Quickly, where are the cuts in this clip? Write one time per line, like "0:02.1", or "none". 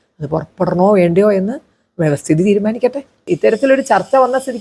0:03.2